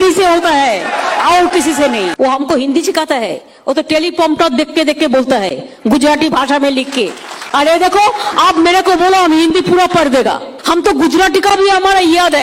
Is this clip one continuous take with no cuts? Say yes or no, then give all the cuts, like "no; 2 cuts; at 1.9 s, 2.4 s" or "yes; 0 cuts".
no; 2 cuts; at 2.1 s, 10.5 s